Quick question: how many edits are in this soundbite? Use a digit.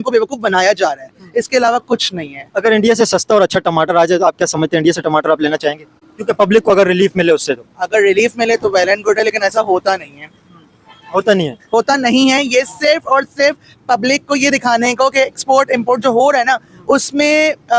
0